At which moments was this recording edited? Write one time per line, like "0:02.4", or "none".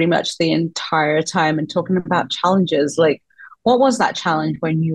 none

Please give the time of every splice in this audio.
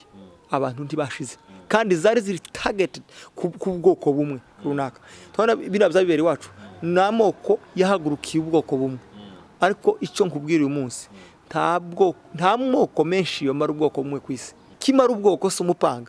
0:14.8

